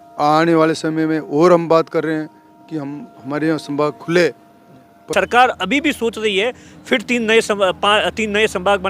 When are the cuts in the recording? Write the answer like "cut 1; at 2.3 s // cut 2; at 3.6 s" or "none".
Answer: cut 1; at 5.0 s